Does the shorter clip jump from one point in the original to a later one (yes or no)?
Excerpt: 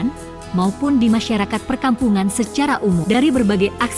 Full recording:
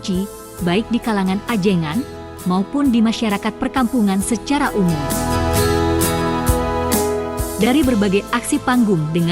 yes